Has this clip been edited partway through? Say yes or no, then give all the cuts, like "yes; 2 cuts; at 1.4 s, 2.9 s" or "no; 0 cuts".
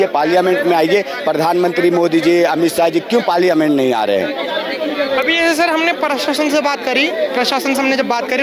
no; 0 cuts